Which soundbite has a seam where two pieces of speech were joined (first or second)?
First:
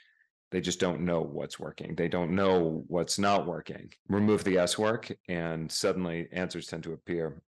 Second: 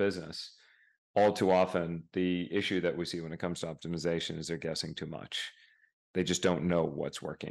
first